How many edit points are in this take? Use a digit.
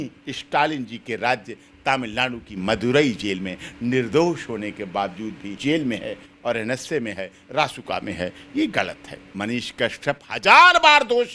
2